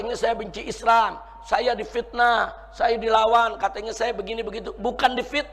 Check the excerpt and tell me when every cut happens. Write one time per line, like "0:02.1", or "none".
none